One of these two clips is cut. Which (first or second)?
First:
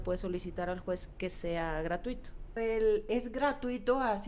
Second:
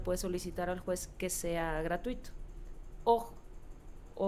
first